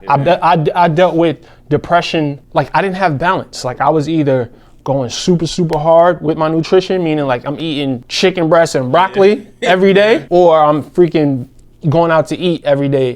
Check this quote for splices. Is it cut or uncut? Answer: cut